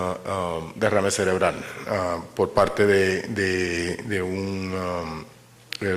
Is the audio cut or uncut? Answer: uncut